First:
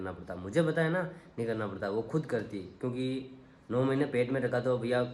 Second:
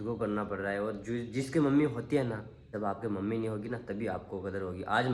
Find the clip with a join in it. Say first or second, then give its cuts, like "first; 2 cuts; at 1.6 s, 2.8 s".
second; 1 cut; at 2.7 s